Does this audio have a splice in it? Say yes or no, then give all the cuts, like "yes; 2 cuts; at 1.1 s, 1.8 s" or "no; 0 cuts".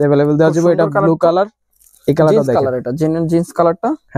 no; 0 cuts